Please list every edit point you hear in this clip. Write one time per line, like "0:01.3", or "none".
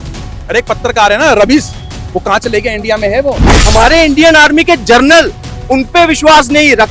0:03.5